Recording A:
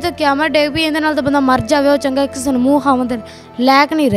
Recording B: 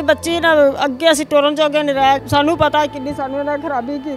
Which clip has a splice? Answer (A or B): B